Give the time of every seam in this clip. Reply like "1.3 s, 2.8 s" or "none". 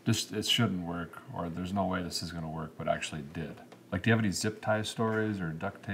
none